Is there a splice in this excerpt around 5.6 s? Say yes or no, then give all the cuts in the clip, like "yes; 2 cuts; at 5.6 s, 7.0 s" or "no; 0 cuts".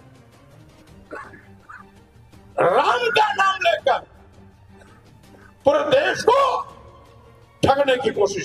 yes; 2 cuts; at 4.1 s, 5.6 s